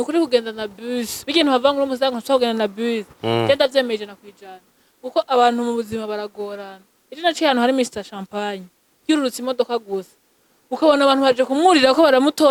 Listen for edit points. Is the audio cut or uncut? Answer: uncut